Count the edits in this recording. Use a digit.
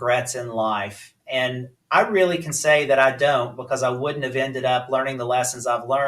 1